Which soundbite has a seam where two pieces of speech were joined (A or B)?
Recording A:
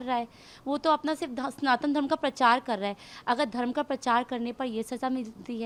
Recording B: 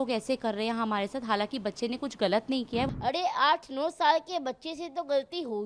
B